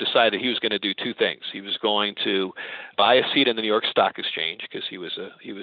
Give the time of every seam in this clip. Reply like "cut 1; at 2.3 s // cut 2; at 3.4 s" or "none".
cut 1; at 2.9 s